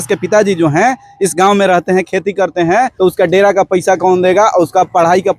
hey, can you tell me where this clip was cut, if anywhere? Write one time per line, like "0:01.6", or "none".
0:02.9